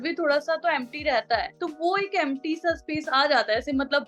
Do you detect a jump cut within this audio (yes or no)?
no